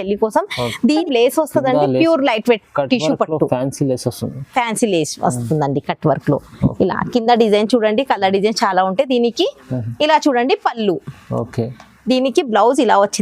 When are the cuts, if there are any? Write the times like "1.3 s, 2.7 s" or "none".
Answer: 1.0 s